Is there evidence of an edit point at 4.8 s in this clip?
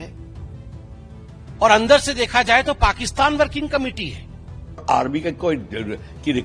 yes; 1 cut; at 4.8 s

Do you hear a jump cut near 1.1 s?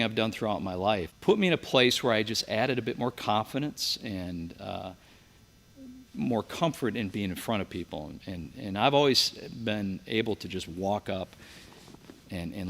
yes; 1 cut; at 1.1 s

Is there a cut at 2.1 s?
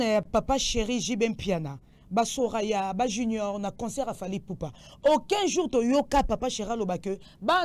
no; 0 cuts

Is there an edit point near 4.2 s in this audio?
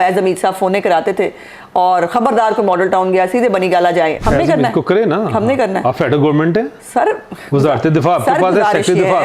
yes; 1 cut; at 4.2 s

